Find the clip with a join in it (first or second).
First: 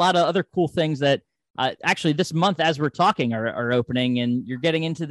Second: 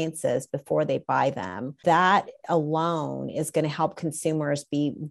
second